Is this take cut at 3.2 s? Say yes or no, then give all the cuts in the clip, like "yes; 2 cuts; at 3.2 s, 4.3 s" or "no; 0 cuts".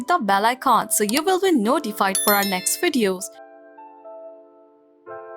yes; 1 cut; at 3.2 s